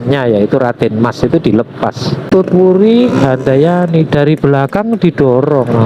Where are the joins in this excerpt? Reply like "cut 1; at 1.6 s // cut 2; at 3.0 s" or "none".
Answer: cut 1; at 2.2 s